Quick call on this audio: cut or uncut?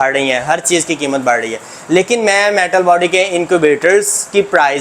uncut